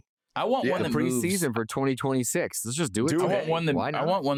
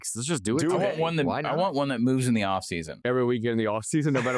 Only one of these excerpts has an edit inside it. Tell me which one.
second; 1 cut; at 3.0 s

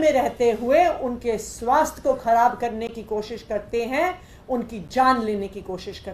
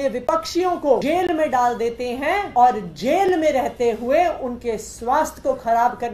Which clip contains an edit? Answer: second; 2 cuts; at 1.0 s, 2.5 s

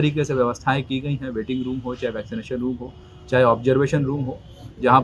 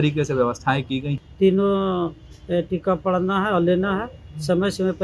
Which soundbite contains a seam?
second; 1 cut; at 1.2 s

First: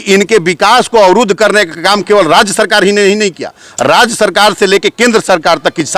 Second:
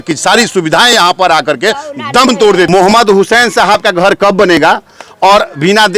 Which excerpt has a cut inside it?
second; 1 cut; at 2.7 s

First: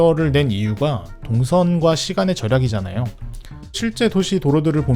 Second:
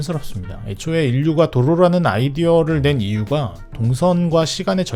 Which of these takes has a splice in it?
first; 1 cut; at 3.8 s

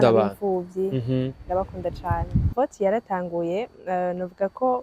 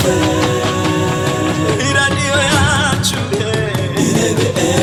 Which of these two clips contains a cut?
first; 1 cut; at 2.5 s

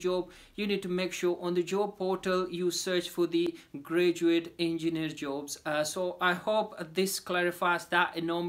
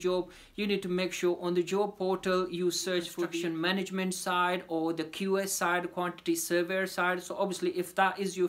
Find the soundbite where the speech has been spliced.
second; 1 cut; at 3.4 s

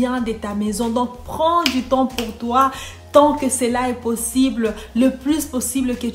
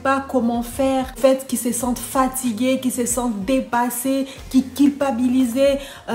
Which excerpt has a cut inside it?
second; 1 cut; at 1.2 s

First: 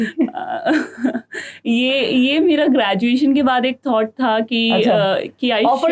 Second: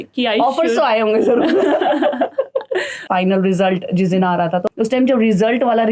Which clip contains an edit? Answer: second; 2 cuts; at 3.1 s, 4.6 s

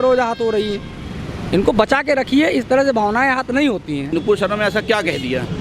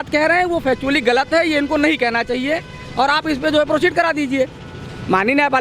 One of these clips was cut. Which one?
first; 1 cut; at 4.1 s

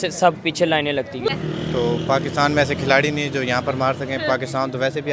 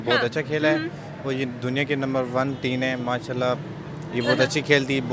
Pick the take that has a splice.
first; 1 cut; at 1.3 s

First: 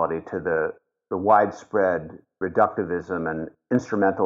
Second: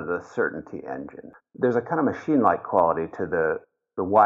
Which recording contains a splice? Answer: second; 1 cut; at 1.4 s

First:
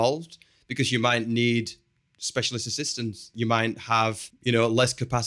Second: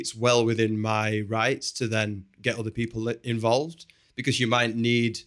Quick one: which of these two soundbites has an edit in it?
first; 2 cuts; at 3.3 s, 4.3 s

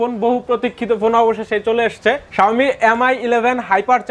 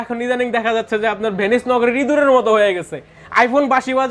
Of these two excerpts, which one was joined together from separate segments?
first; 1 cut; at 2.2 s

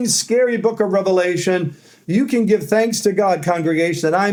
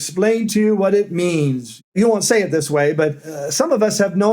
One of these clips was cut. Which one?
second; 2 cuts; at 1.9 s, 3.3 s

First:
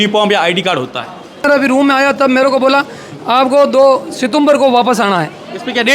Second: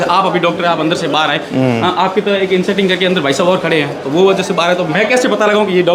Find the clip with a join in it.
first; 1 cut; at 1.4 s

